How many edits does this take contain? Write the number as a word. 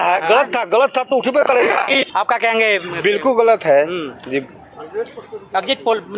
one